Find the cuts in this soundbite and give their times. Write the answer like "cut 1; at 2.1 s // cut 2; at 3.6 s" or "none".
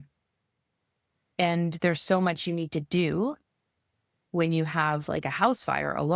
none